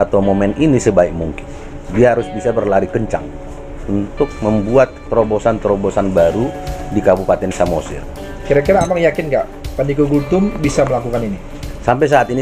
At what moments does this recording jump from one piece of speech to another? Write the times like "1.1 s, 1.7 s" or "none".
1.8 s, 8.4 s